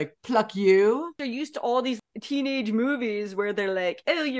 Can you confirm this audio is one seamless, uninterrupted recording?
no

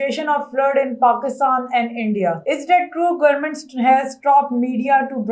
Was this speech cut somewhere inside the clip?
yes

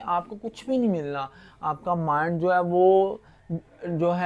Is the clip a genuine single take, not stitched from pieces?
yes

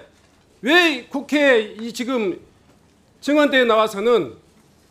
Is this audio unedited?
yes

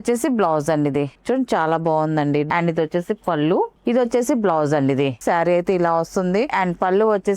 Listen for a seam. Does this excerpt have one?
yes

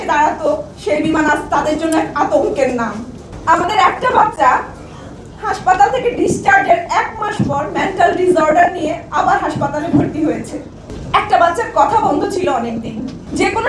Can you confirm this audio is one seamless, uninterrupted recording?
yes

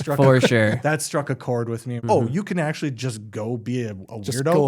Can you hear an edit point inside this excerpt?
yes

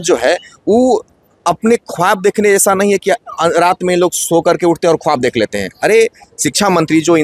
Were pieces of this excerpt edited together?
no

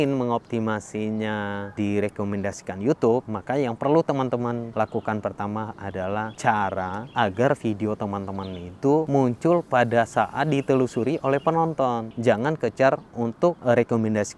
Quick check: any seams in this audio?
yes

